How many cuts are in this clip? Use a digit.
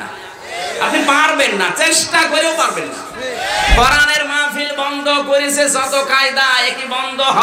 0